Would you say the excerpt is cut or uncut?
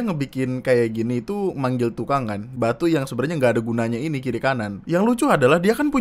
cut